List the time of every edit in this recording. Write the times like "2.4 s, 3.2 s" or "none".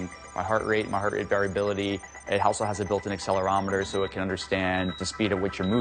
4.9 s